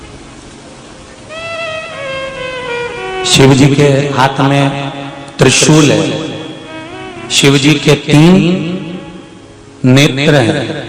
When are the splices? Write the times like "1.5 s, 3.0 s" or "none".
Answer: none